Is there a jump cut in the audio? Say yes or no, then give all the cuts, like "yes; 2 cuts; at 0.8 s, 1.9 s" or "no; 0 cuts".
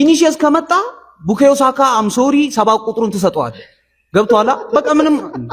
no; 0 cuts